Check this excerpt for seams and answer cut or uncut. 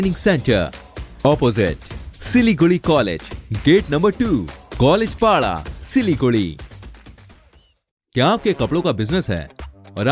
uncut